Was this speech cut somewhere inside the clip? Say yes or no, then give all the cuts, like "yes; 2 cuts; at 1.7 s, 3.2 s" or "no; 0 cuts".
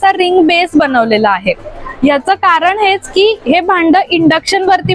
no; 0 cuts